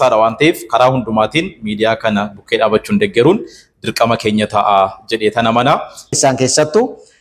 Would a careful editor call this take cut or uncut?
cut